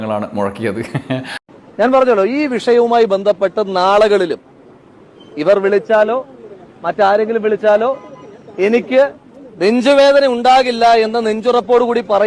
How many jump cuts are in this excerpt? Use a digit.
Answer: 1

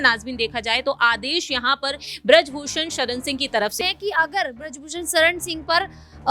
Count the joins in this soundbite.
1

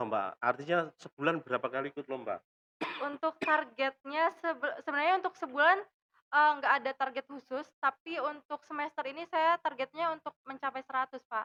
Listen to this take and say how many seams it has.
0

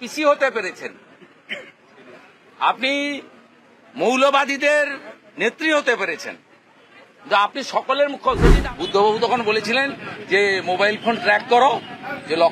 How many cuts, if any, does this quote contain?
1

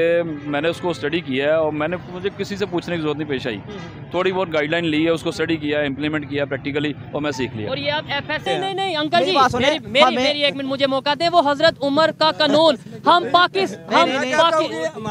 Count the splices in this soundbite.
1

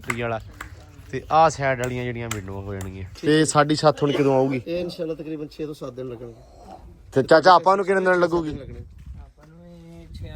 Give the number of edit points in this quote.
1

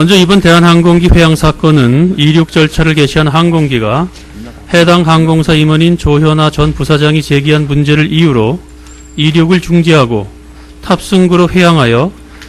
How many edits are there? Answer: 1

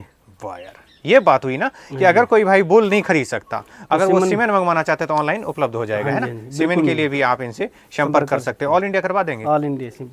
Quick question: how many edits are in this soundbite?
0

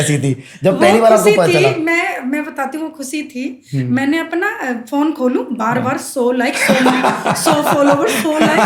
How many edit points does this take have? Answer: 0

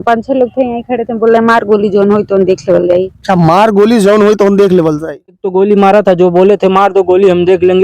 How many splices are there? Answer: 1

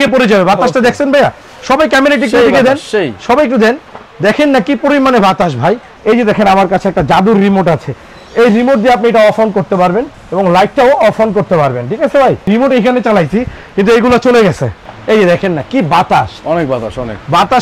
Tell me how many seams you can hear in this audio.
4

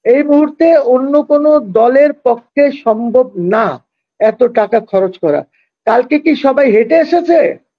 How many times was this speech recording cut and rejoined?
0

